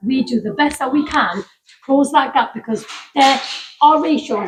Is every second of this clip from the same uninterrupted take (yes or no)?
yes